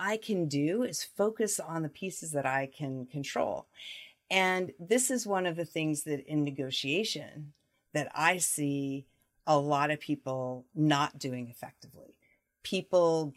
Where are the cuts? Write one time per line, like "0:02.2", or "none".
none